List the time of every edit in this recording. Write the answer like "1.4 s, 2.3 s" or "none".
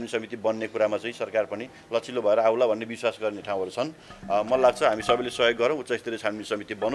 none

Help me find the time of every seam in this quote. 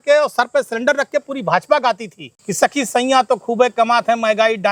none

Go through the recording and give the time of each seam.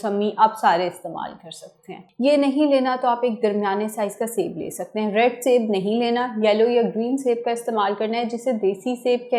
none

